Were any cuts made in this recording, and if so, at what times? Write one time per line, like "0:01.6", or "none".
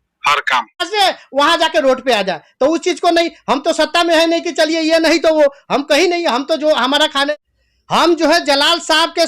0:00.8
0:07.3